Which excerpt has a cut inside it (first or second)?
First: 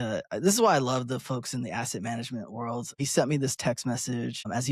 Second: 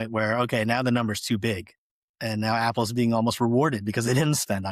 first